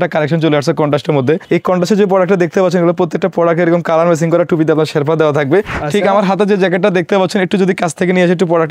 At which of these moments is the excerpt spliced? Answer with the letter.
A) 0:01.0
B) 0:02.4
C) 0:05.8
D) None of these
C